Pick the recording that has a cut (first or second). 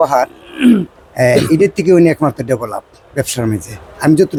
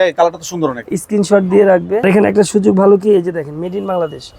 second